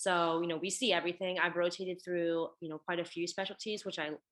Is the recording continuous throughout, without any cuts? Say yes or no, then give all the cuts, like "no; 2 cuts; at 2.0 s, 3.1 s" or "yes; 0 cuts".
yes; 0 cuts